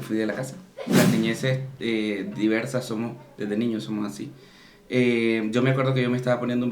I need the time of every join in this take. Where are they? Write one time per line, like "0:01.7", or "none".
0:01.0